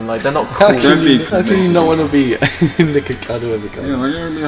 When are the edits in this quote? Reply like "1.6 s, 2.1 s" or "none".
1.2 s